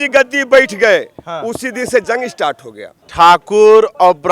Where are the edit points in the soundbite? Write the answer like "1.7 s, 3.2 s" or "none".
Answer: 3.0 s